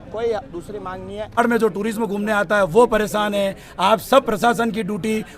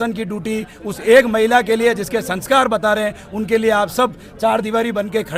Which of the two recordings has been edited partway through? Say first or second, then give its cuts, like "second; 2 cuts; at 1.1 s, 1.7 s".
first; 1 cut; at 1.4 s